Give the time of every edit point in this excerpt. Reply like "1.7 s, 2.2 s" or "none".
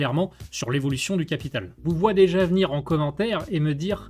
1.7 s